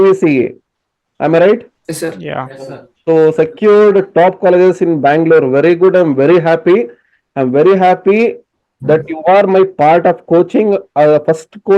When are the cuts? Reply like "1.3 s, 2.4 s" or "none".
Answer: 1.7 s